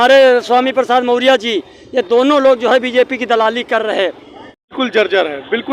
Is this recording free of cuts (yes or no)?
no